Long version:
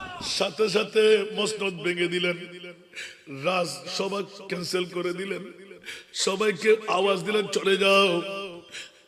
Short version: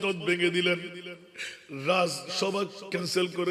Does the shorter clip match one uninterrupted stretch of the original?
yes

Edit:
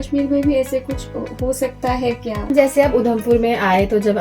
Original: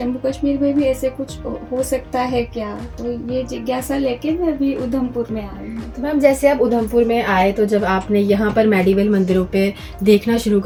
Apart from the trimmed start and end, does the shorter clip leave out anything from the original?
yes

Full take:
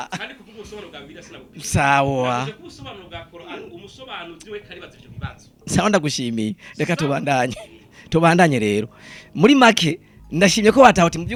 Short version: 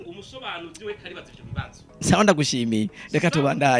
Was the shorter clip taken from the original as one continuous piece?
yes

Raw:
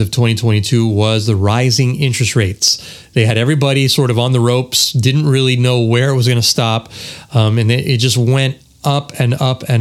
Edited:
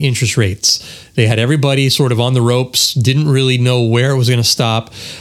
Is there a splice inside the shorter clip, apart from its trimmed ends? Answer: no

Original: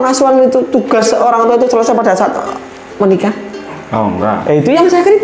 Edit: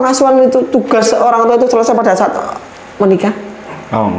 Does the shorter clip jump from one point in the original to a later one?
no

